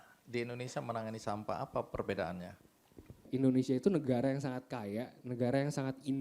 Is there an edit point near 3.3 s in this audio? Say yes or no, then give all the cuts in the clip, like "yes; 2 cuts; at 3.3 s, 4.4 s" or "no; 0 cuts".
yes; 1 cut; at 3.3 s